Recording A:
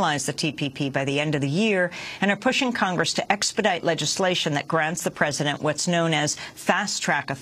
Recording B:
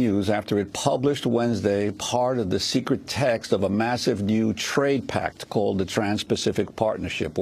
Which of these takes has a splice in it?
A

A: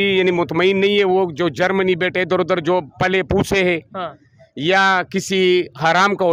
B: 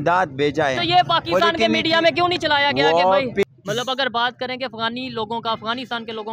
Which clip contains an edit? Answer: B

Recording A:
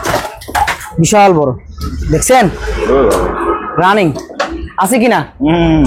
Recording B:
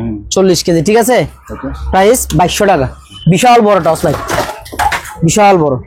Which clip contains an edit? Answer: B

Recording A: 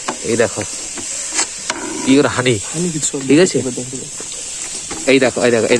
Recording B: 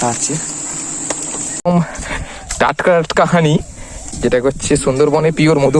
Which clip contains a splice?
B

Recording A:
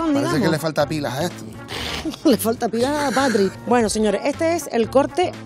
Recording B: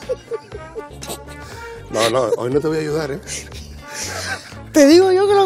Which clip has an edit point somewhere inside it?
A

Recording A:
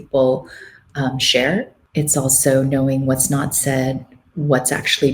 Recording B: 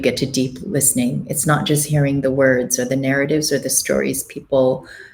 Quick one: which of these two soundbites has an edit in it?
A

